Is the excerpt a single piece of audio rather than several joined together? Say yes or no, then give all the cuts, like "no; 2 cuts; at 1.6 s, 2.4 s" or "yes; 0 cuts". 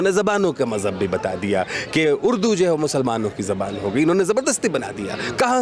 yes; 0 cuts